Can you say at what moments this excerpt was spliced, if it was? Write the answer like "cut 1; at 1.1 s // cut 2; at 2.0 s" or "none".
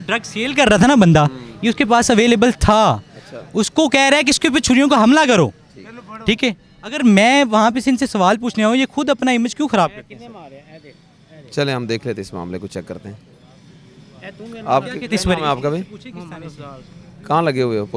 none

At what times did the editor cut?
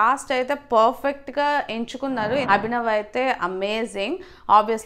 cut 1; at 2.5 s

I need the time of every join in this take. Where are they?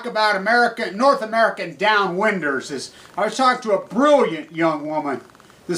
cut 1; at 2.6 s

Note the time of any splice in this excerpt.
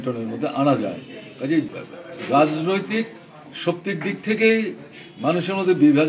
cut 1; at 1.7 s

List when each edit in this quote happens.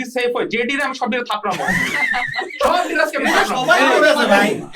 none

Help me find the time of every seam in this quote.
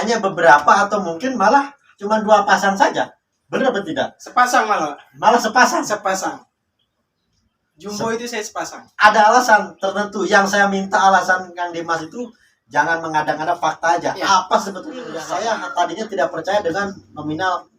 cut 1; at 15.1 s

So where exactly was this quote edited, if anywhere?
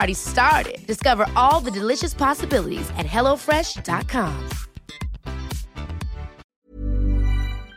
cut 1; at 6.4 s

